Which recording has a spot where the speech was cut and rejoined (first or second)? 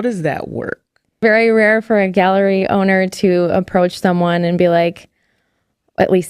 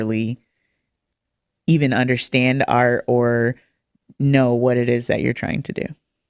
first